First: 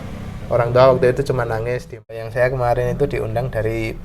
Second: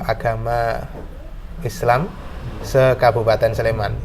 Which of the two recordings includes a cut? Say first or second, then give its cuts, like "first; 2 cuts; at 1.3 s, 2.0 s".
first; 1 cut; at 2.2 s